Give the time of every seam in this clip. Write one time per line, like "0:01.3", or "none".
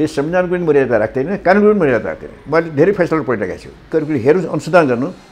0:03.8